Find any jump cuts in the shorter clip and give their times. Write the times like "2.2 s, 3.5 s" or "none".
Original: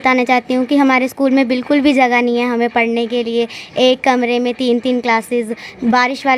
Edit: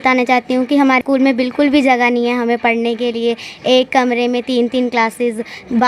1.0 s